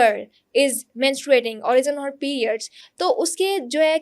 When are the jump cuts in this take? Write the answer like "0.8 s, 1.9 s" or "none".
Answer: none